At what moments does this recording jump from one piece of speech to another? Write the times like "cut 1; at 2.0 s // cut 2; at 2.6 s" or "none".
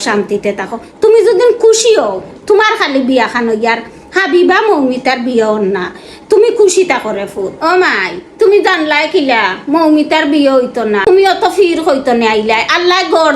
cut 1; at 7.5 s